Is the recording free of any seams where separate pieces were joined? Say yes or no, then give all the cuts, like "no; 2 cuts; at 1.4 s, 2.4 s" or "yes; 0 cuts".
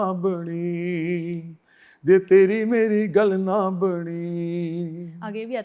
yes; 0 cuts